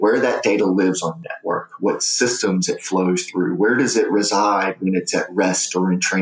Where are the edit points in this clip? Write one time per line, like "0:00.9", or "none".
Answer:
none